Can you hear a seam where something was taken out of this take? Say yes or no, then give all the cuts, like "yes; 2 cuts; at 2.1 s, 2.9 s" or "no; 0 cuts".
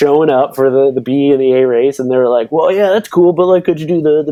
no; 0 cuts